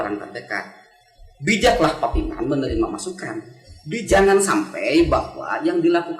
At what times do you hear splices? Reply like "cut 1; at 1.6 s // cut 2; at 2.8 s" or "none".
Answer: cut 1; at 4.0 s